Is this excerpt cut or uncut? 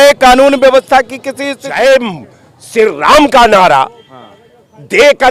cut